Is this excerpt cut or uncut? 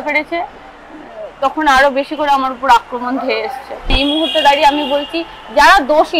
cut